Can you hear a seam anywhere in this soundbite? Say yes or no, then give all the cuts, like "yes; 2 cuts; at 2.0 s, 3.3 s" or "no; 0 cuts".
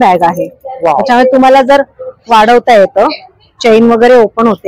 no; 0 cuts